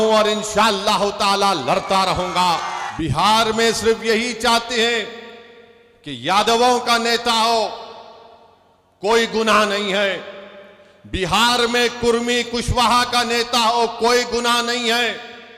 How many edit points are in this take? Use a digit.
1